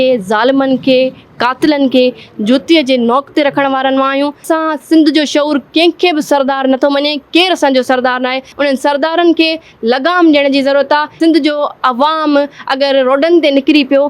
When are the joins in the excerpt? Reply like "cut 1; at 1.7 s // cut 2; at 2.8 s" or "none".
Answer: cut 1; at 4.4 s // cut 2; at 8.5 s // cut 3; at 11.2 s